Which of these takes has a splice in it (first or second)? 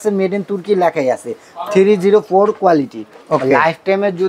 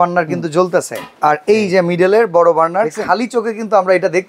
second